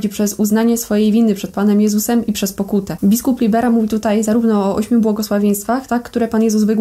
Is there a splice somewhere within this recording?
no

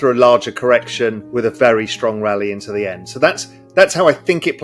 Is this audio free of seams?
no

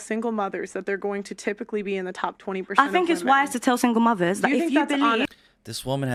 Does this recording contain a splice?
no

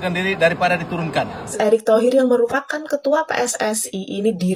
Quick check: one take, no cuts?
no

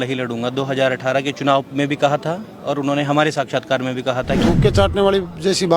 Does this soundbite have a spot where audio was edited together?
yes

